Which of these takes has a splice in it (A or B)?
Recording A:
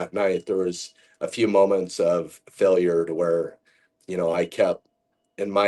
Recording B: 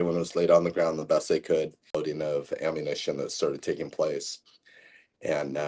B